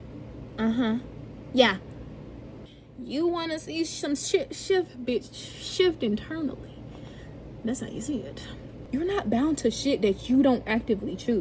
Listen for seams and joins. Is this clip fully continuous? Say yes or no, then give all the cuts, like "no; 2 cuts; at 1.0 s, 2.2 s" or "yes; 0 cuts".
no; 2 cuts; at 2.5 s, 8.8 s